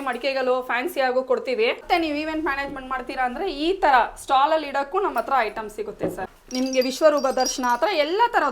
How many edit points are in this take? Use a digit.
1